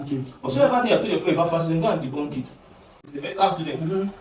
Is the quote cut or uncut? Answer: cut